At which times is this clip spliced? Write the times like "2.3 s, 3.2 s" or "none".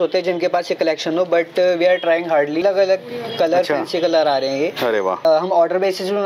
2.6 s, 5.2 s